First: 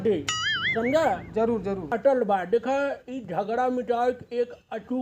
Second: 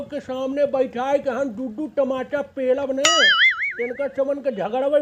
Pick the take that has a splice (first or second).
first